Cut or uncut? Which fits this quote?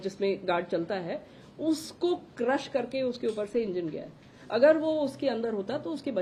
uncut